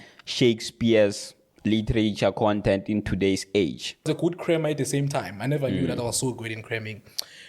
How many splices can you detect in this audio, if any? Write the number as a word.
one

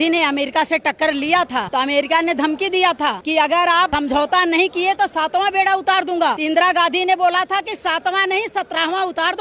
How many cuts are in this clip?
four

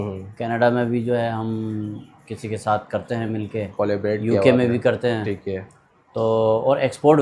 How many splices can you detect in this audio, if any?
zero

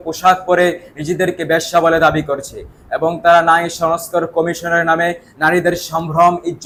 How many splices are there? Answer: zero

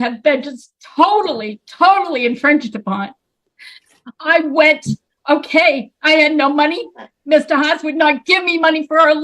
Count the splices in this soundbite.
zero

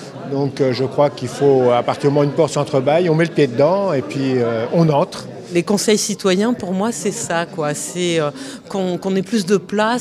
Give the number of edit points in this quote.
one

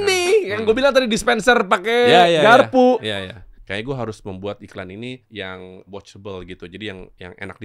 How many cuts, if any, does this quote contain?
two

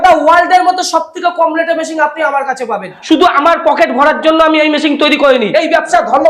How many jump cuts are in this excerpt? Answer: two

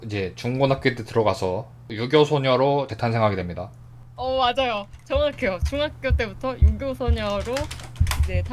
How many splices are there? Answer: one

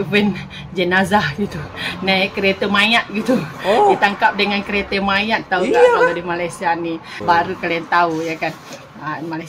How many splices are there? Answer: one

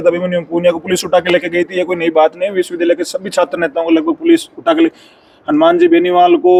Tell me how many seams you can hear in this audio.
zero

